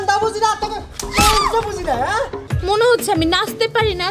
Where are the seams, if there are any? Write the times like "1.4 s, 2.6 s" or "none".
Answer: 2.4 s